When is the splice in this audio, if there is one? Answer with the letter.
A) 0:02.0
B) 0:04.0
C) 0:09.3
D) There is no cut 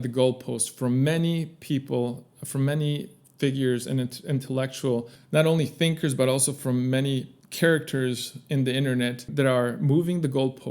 C